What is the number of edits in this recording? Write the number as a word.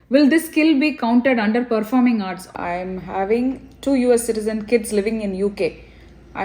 one